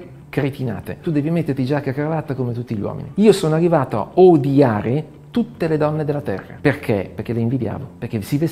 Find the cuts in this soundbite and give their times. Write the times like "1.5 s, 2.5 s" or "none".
none